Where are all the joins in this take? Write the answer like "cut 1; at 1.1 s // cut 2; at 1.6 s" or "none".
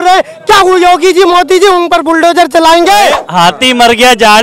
cut 1; at 3.2 s